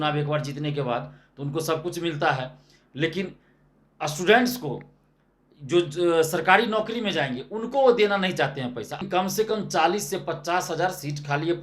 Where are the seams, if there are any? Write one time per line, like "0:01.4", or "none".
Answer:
0:09.0